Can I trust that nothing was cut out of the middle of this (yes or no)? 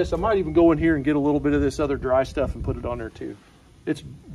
yes